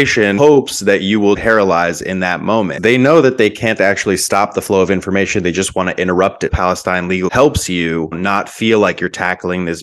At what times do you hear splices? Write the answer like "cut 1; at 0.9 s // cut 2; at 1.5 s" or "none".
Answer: cut 1; at 1.4 s // cut 2; at 2.7 s // cut 3; at 6.5 s // cut 4; at 8.1 s